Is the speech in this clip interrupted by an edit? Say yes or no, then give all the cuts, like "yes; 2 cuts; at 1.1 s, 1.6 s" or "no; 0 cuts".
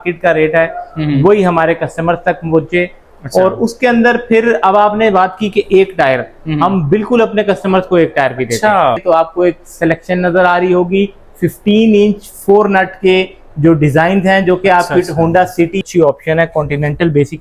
yes; 2 cuts; at 9.0 s, 15.8 s